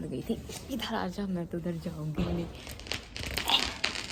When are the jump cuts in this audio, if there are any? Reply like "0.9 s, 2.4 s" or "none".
none